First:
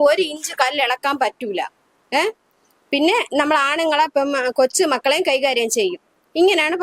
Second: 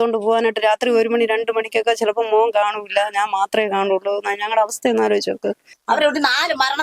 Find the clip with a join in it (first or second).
second